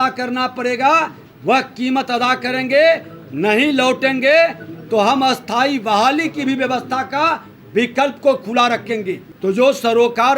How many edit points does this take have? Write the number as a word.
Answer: one